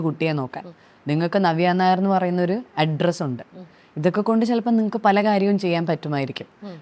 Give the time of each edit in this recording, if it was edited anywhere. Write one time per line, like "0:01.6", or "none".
none